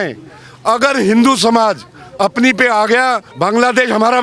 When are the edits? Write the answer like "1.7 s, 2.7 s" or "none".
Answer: 3.3 s